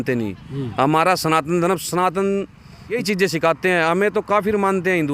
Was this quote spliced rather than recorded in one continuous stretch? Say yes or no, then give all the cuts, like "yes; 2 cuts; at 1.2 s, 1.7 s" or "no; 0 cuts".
yes; 1 cut; at 3.0 s